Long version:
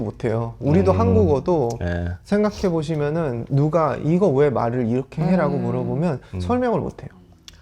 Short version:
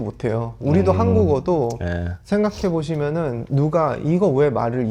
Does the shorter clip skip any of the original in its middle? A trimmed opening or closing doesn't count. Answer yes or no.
no